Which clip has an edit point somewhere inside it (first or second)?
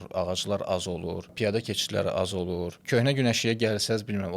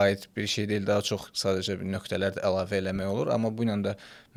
first